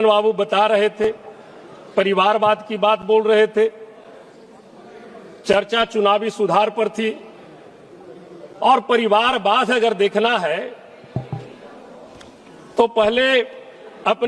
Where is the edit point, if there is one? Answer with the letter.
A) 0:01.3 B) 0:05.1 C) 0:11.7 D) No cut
D